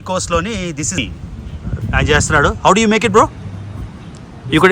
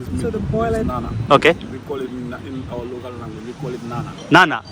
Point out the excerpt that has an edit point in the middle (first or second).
first